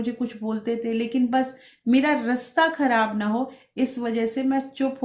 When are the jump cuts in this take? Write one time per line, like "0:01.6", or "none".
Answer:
none